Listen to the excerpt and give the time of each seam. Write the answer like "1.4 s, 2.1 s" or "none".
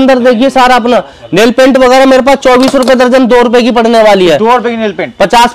none